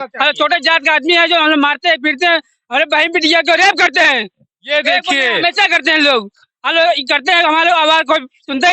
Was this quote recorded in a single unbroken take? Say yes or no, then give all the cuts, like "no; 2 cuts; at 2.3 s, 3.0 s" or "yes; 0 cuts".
yes; 0 cuts